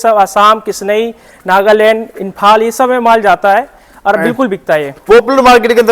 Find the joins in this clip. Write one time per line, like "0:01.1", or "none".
none